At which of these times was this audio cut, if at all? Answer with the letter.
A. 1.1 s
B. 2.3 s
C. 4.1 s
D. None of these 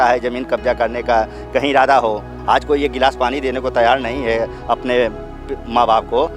B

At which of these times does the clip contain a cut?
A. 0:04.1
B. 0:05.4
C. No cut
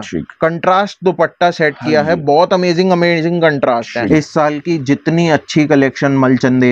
A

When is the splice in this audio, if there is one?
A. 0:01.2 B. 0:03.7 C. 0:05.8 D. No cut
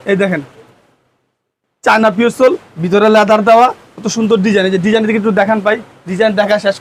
D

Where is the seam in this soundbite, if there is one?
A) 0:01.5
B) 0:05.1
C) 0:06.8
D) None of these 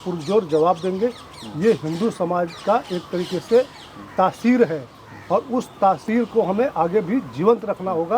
D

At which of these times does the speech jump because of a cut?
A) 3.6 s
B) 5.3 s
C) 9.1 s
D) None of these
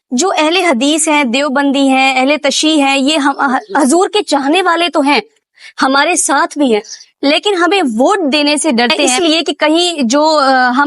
C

